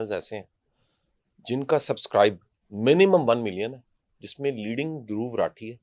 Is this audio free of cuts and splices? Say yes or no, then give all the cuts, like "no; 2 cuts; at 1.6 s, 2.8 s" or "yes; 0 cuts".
yes; 0 cuts